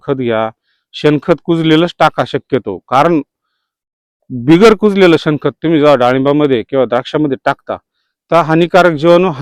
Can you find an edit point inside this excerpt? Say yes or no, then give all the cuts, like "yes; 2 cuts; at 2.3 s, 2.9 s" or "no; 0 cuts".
no; 0 cuts